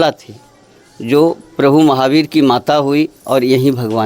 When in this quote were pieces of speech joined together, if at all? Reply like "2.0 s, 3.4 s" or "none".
none